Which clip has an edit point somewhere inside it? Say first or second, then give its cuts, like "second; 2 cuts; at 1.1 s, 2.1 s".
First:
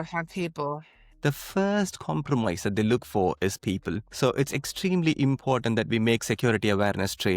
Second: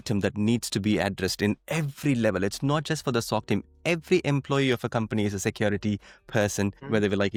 first; 2 cuts; at 1.1 s, 4.1 s